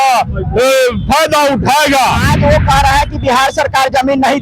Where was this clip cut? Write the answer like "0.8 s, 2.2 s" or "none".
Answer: 2.3 s